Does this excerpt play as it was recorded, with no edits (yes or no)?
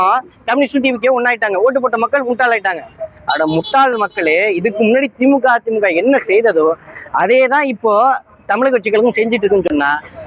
yes